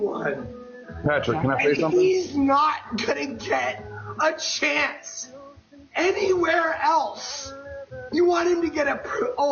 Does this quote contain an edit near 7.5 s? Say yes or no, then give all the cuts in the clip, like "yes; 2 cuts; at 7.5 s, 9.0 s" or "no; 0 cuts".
no; 0 cuts